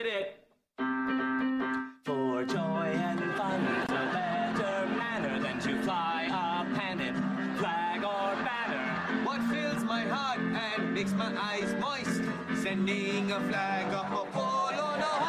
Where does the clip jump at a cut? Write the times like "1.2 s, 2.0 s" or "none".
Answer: 3.9 s

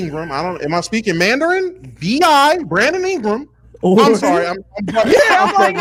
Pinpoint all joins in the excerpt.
none

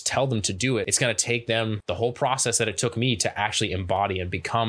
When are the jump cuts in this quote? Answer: 0.9 s, 1.8 s

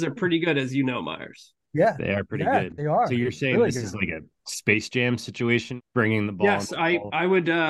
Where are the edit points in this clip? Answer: 5.7 s

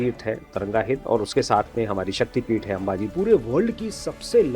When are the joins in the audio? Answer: 3.0 s

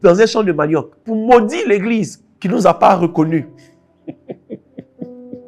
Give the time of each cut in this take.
1.0 s

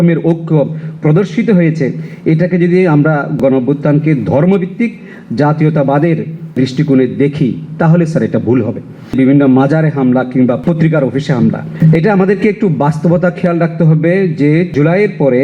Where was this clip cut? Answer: 9.1 s, 11.7 s

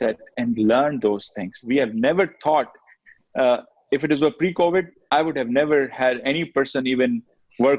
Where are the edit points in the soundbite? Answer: 1.5 s

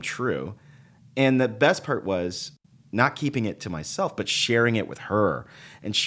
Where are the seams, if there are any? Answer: 2.5 s

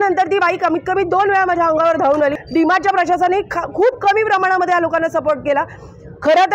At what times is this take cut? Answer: 2.4 s

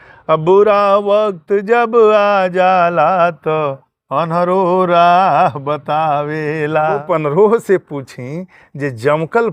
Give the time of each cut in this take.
7.0 s

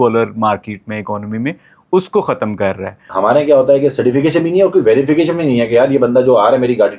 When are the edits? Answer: 3.0 s

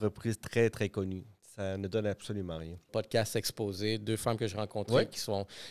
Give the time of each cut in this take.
2.9 s

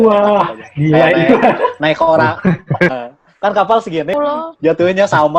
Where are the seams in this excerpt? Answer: 2.9 s, 4.1 s

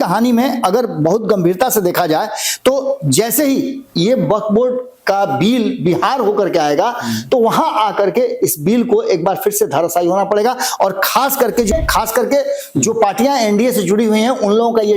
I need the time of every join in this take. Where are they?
11.7 s

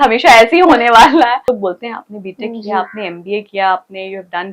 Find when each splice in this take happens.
1.5 s

